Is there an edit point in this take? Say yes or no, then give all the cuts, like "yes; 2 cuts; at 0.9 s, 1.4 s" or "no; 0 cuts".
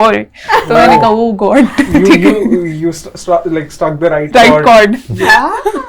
no; 0 cuts